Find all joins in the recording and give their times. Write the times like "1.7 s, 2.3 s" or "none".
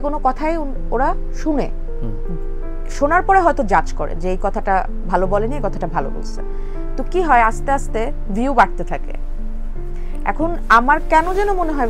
none